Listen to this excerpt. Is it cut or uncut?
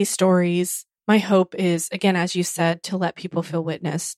uncut